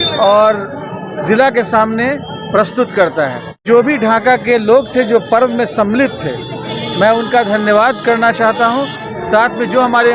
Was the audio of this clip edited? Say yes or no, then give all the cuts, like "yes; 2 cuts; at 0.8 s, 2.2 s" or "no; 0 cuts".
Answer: no; 0 cuts